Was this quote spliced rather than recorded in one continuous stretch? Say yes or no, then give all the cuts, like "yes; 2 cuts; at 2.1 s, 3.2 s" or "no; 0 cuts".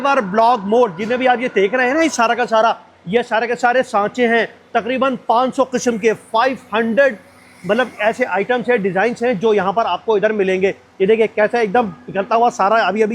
no; 0 cuts